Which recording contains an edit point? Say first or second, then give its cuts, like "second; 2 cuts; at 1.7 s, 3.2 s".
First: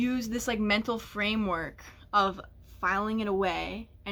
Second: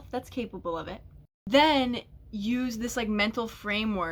second; 1 cut; at 1.5 s